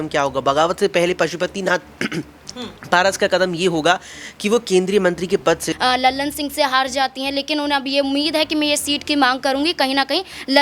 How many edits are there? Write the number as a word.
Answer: one